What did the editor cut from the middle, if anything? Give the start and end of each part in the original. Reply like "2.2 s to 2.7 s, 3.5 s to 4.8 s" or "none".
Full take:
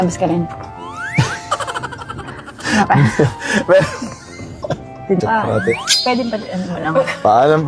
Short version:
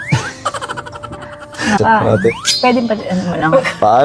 2.8 s to 5.2 s